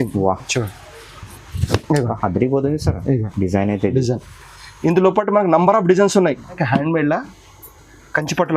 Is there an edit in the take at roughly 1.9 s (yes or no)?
no